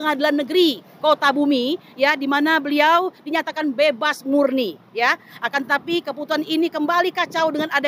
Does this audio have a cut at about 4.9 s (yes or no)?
no